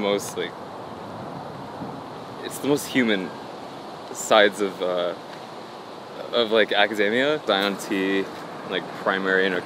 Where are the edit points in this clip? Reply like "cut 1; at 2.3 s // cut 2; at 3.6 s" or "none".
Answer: cut 1; at 7.4 s